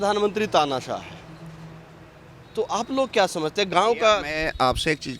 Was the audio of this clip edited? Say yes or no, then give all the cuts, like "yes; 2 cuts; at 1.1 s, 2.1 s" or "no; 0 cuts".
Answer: no; 0 cuts